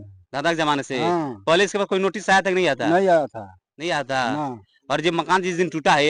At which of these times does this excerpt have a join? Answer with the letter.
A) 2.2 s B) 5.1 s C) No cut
C